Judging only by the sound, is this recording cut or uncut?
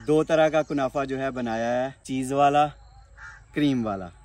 cut